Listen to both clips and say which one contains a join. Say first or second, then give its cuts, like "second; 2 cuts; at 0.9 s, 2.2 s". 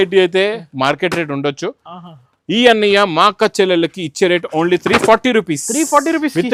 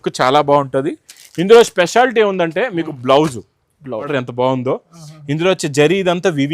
second; 1 cut; at 4.1 s